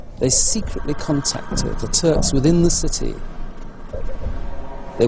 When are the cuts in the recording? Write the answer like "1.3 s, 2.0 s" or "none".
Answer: 1.3 s